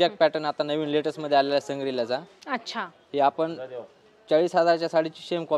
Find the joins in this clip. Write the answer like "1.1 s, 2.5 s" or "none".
none